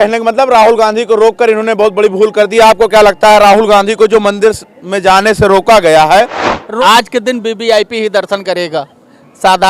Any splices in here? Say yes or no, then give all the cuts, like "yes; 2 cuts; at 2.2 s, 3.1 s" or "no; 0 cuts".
yes; 1 cut; at 6.4 s